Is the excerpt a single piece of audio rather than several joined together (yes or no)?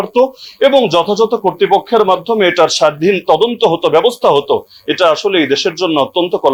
yes